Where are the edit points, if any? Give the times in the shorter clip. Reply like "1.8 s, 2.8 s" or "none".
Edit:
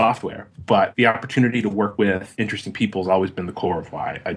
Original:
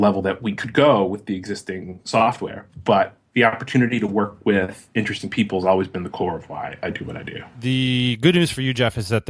0.9 s, 2.1 s